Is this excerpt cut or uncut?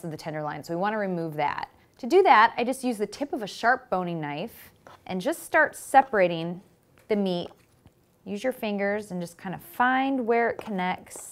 cut